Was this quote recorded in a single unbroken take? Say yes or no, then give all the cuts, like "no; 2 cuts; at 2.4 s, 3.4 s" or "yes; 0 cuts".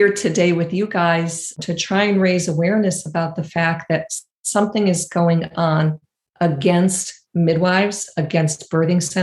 no; 1 cut; at 1.6 s